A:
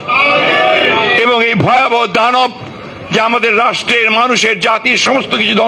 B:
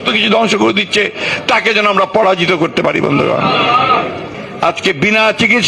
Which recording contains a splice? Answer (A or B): B